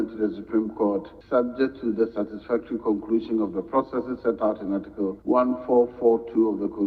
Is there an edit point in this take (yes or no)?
yes